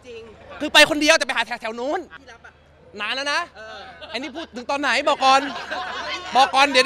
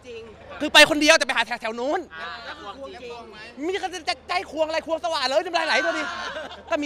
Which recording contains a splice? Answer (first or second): first